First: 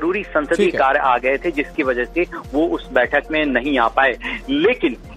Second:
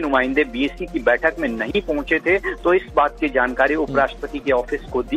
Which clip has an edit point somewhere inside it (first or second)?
first